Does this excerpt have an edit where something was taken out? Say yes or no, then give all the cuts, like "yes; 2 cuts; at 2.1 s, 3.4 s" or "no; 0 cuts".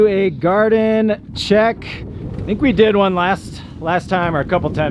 no; 0 cuts